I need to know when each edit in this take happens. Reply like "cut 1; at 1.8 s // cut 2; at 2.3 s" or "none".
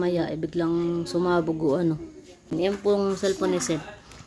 cut 1; at 2.5 s